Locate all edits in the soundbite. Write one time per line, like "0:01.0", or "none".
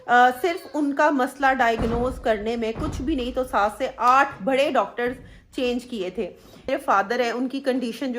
0:06.7